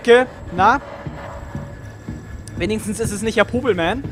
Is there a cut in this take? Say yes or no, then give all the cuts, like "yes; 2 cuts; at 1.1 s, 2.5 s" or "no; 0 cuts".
no; 0 cuts